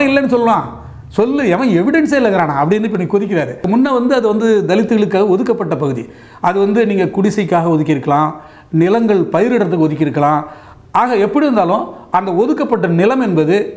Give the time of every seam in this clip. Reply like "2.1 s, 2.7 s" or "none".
3.6 s